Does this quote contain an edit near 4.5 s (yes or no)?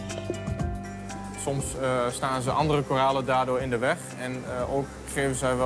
yes